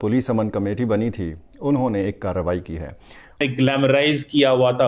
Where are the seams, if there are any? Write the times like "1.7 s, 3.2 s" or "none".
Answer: 3.4 s